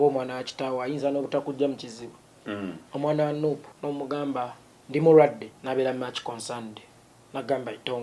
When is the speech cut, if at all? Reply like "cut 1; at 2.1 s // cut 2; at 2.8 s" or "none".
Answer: cut 1; at 2.4 s // cut 2; at 3.7 s // cut 3; at 5.5 s